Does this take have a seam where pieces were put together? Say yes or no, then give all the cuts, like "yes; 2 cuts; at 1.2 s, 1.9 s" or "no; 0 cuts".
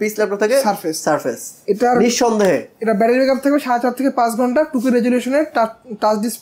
no; 0 cuts